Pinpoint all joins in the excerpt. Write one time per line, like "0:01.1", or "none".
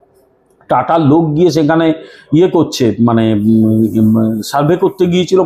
none